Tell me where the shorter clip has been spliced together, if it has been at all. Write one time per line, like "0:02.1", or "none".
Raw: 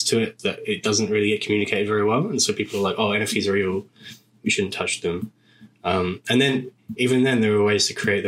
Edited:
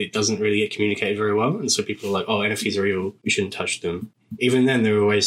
0:03.2
0:04.2